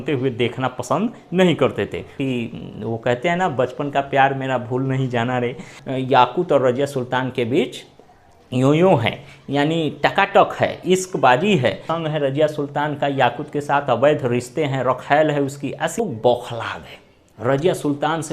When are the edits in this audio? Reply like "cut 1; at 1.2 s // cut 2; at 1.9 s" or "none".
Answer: cut 1; at 2.2 s // cut 2; at 5.7 s // cut 3; at 11.9 s // cut 4; at 16.0 s